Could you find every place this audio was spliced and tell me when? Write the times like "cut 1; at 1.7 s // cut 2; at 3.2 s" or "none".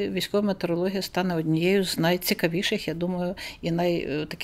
none